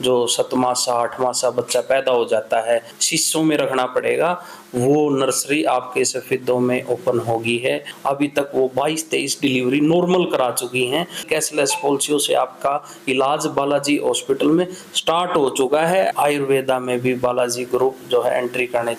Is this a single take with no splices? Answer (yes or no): no